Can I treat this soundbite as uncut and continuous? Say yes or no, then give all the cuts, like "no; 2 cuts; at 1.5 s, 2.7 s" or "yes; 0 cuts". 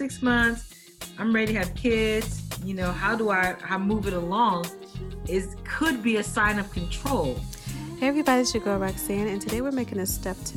no; 1 cut; at 7.9 s